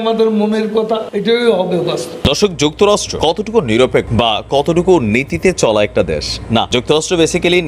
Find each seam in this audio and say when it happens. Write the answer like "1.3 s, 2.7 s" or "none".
1.1 s, 2.2 s